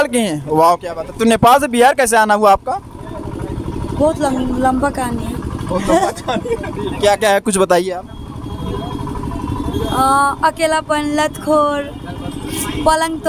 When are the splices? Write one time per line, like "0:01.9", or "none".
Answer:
0:06.7